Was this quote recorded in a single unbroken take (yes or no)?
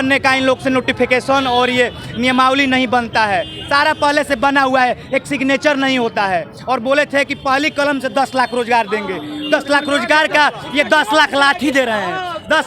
yes